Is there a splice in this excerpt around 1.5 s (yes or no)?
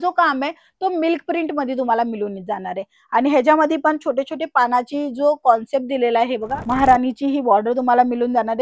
no